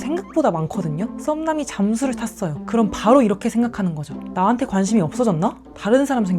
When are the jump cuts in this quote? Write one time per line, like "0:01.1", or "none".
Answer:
0:01.1
0:02.6